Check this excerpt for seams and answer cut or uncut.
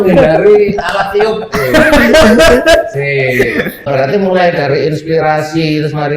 cut